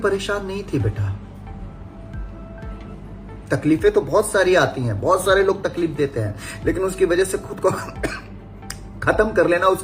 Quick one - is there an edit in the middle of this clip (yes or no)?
no